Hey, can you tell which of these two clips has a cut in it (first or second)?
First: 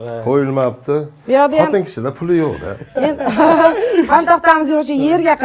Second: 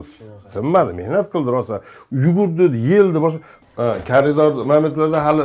second